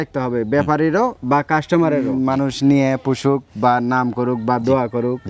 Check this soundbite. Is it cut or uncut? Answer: cut